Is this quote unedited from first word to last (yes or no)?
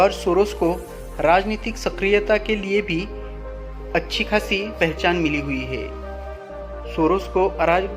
no